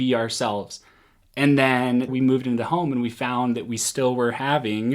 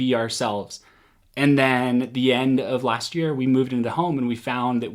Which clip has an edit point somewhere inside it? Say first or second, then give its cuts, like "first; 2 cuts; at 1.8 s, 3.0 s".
first; 1 cut; at 2.1 s